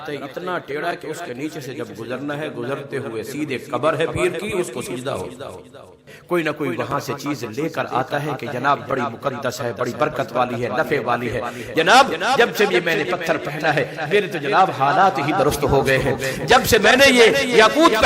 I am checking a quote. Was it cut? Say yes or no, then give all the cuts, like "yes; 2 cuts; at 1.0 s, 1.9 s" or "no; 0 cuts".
yes; 1 cut; at 6.3 s